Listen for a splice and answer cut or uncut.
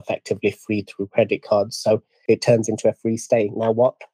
cut